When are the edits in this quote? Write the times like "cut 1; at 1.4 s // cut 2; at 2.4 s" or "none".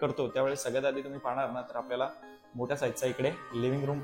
none